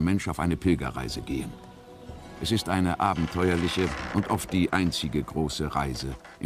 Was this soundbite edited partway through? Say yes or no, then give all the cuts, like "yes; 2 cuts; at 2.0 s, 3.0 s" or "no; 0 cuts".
yes; 1 cut; at 1.5 s